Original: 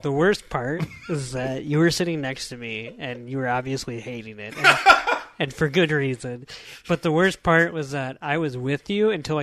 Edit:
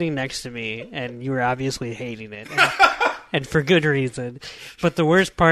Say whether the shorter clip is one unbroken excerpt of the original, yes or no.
yes